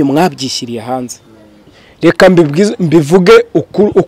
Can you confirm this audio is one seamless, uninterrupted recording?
no; 1 cut; at 1.7 s

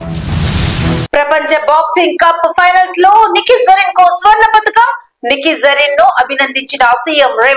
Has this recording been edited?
no; 0 cuts

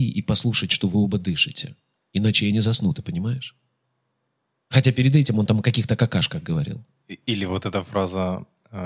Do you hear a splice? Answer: no; 0 cuts

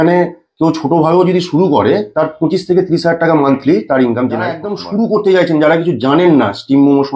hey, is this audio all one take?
no; 1 cut; at 4.7 s

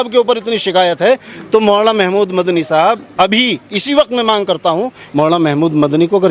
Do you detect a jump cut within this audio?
yes; 1 cut; at 5.0 s

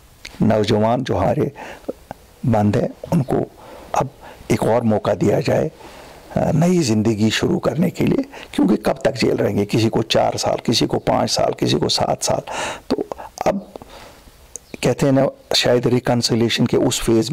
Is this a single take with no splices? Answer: no; 1 cut; at 1.3 s

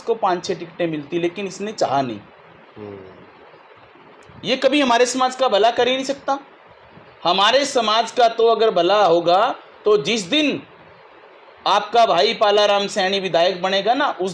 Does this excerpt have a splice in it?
no; 0 cuts

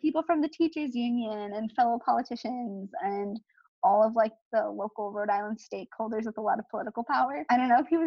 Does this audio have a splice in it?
no; 0 cuts

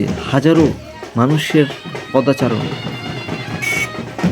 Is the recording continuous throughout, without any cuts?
yes; 0 cuts

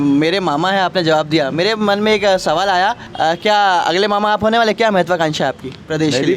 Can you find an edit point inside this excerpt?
yes; 1 cut; at 3.0 s

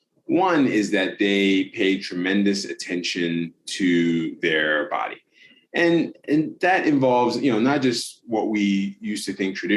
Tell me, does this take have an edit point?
no; 0 cuts

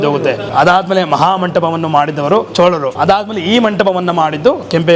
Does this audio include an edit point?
yes; 1 cut; at 2.7 s

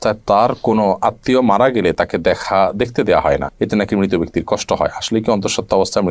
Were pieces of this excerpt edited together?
no; 0 cuts

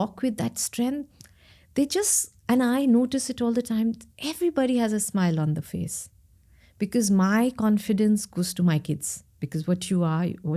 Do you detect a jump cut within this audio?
no; 0 cuts

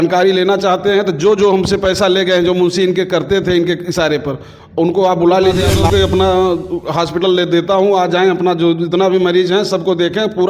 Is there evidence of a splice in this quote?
yes; 1 cut; at 5.7 s

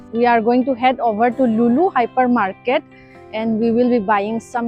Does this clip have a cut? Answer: no; 0 cuts

